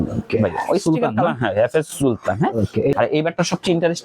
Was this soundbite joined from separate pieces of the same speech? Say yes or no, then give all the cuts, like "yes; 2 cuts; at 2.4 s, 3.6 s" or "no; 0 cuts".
yes; 1 cut; at 2.9 s